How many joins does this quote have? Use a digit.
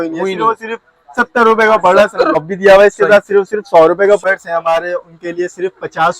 2